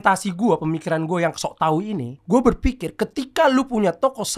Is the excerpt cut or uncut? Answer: cut